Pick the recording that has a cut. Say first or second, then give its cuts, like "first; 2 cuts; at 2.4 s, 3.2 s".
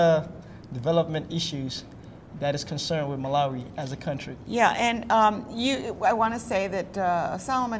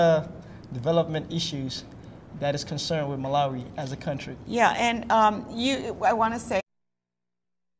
first; 1 cut; at 6.6 s